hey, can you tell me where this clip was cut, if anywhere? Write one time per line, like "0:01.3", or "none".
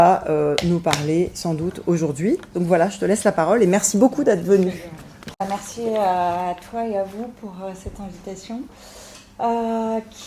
0:05.4